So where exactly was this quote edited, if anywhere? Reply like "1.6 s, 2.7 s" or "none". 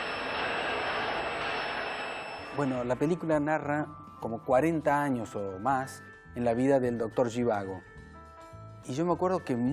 none